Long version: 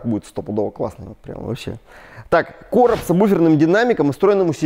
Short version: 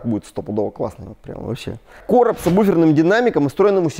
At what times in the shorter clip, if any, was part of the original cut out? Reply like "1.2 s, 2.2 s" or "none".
1.9 s